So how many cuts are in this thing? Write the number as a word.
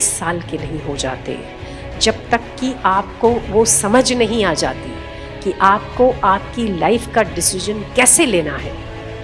zero